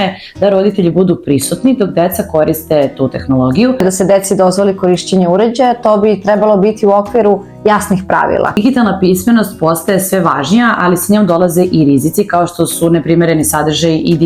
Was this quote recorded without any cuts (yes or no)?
no